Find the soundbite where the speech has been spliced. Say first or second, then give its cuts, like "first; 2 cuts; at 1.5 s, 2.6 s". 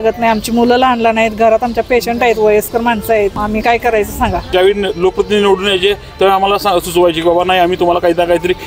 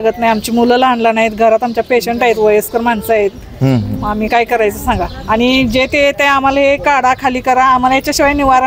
first; 2 cuts; at 3.4 s, 4.5 s